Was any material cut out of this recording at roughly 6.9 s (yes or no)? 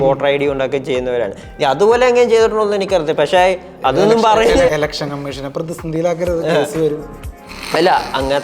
no